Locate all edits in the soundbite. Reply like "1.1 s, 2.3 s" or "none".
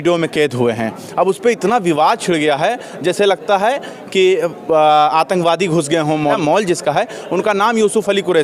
6.4 s